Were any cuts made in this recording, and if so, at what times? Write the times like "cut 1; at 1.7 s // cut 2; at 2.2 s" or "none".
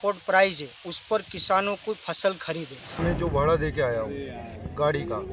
cut 1; at 2.8 s

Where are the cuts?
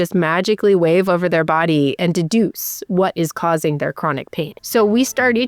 cut 1; at 4.6 s

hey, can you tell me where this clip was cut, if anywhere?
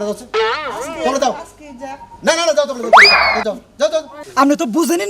cut 1; at 4.2 s

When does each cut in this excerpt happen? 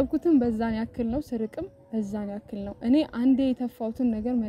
none

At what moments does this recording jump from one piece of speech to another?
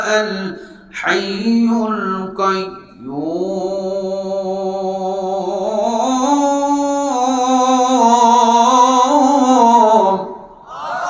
none

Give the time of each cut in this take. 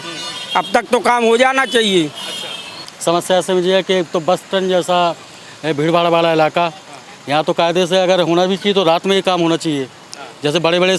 cut 1; at 2.8 s

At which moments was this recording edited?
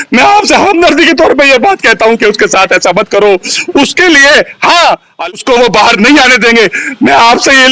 cut 1; at 5.3 s

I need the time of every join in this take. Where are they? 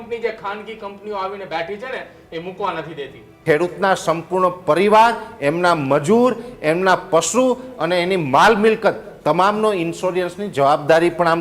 cut 1; at 3.4 s

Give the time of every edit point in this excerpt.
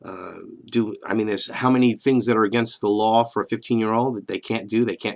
cut 1; at 2.4 s

